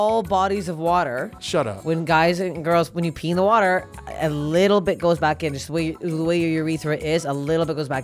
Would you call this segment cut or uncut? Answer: cut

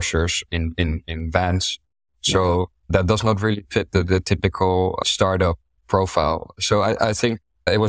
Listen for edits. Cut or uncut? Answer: uncut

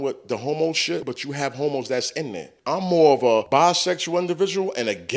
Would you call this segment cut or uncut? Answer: cut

